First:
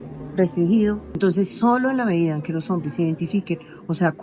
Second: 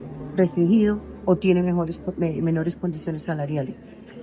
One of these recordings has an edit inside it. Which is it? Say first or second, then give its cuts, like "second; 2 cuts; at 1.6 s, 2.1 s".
first; 1 cut; at 1.2 s